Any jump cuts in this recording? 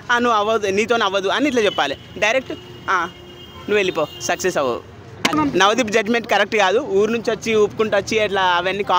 yes; 1 cut; at 5.3 s

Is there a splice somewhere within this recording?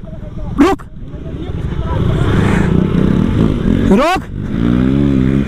yes; 1 cut; at 4.6 s

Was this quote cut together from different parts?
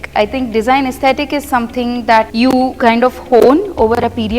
yes; 1 cut; at 2.3 s

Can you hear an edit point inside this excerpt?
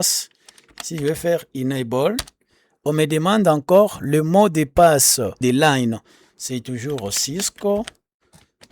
yes; 1 cut; at 5.4 s

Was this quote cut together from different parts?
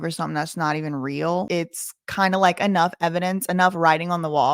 yes; 1 cut; at 1.5 s

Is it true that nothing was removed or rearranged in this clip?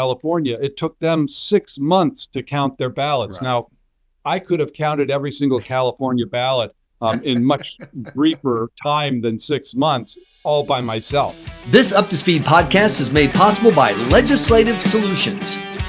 no; 1 cut; at 11.4 s

